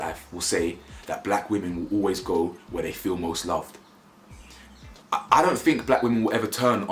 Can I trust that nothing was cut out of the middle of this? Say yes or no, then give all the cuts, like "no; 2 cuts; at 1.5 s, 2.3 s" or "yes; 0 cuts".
yes; 0 cuts